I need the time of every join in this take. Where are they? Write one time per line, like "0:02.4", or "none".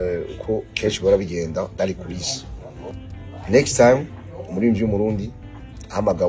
0:02.9